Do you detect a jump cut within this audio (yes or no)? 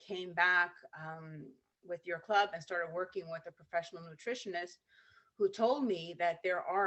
no